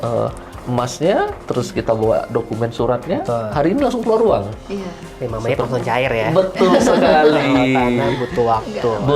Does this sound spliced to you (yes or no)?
no